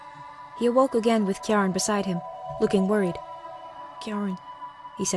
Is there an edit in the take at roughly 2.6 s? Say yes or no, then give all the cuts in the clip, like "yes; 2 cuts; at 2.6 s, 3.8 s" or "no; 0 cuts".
no; 1 cut; at 4.2 s